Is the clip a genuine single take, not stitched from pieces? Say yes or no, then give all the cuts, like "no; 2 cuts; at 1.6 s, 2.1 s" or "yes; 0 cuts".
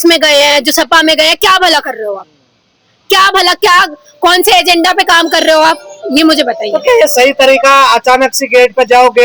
yes; 0 cuts